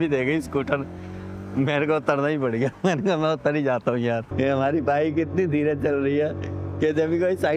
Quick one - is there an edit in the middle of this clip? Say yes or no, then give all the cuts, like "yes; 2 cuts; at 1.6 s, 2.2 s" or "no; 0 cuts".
no; 0 cuts